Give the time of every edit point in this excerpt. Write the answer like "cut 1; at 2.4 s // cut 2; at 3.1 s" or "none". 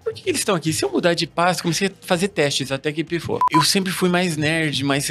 cut 1; at 3.4 s